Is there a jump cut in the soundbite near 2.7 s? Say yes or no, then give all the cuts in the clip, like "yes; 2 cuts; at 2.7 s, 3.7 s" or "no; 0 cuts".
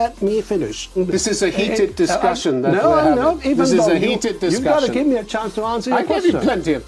no; 1 cut; at 1.0 s